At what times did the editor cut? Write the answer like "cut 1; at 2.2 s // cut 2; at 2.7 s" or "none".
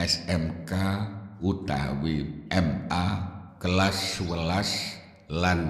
cut 1; at 2.9 s